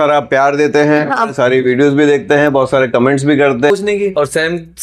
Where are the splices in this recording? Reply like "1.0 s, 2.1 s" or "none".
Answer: 3.7 s